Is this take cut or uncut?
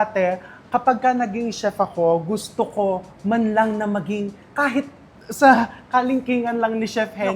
uncut